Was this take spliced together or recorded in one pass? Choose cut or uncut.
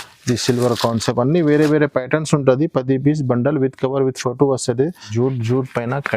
cut